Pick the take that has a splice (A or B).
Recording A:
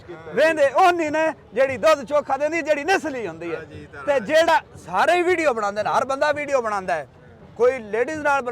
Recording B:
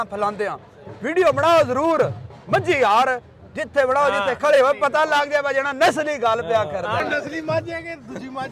B